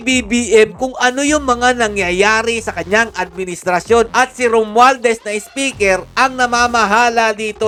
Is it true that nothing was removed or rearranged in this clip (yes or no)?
yes